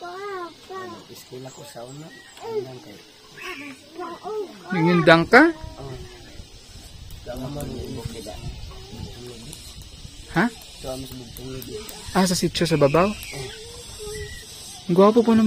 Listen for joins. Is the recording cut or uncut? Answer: cut